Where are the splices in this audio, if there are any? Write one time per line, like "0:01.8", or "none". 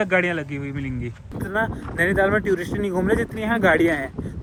none